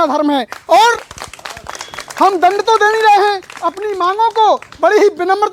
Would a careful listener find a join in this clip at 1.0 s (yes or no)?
no